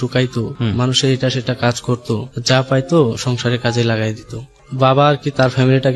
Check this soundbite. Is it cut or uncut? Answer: cut